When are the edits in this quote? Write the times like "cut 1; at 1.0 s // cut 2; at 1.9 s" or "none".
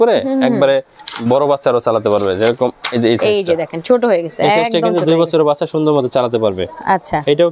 none